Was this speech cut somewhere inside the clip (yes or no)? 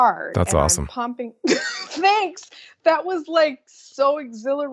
no